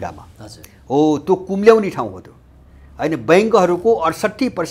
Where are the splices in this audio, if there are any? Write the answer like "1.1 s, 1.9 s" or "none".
none